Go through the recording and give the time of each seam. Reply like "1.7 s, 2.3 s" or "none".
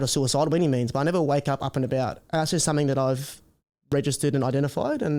none